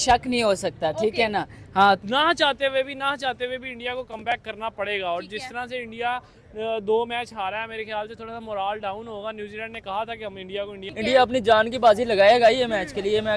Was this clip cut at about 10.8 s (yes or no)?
yes